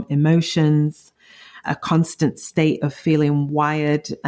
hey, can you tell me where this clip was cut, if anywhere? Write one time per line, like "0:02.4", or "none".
0:01.5